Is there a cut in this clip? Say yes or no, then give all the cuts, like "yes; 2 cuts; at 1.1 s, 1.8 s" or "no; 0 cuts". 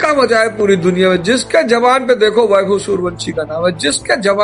no; 0 cuts